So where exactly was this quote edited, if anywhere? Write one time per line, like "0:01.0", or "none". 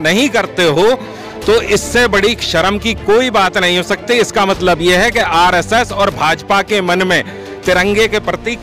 none